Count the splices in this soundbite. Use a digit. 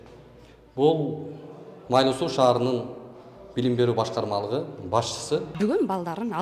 1